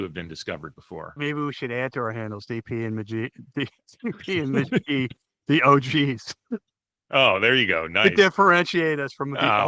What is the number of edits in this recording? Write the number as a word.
one